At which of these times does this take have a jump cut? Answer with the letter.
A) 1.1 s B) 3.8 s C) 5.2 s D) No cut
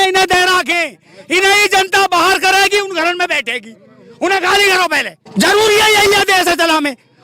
C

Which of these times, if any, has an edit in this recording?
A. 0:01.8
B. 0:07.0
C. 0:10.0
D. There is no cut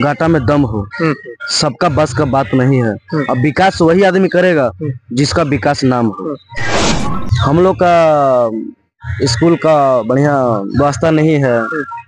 B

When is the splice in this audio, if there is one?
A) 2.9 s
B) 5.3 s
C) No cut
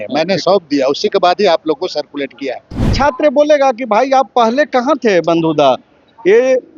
A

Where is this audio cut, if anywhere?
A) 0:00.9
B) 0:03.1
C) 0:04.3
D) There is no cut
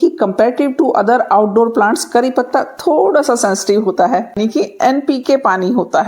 C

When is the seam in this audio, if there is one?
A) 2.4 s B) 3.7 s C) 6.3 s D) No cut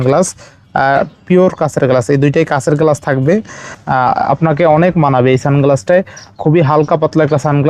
B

